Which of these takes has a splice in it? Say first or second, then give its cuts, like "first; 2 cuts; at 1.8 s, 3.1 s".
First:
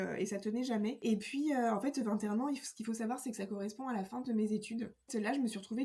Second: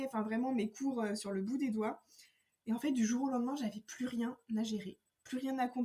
first; 2 cuts; at 1.0 s, 5.1 s